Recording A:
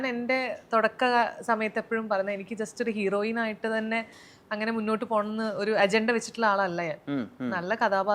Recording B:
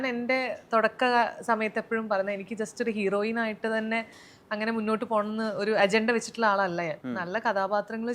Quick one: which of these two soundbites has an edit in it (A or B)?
B